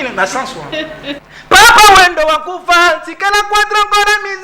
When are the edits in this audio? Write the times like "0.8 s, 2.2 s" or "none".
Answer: 1.2 s